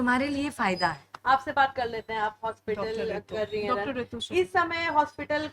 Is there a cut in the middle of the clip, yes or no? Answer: no